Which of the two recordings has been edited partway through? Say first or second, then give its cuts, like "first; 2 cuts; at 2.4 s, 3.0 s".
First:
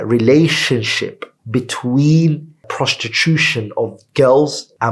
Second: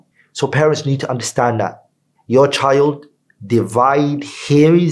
second; 1 cut; at 2.0 s